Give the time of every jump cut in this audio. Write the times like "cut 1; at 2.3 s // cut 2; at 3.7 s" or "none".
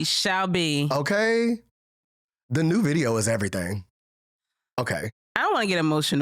cut 1; at 4.8 s